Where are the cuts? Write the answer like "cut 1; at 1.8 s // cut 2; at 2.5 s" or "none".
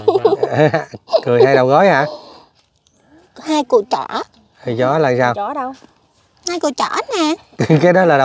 none